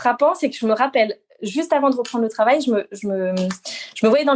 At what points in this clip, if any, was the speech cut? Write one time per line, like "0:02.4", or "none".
none